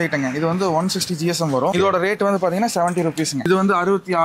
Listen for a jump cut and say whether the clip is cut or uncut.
cut